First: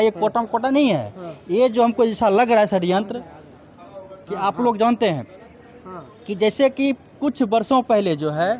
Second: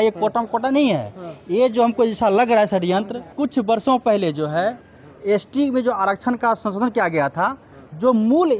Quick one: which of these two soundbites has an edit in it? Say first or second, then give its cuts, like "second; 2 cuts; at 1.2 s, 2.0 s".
second; 1 cut; at 3.2 s